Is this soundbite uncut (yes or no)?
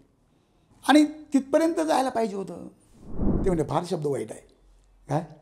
no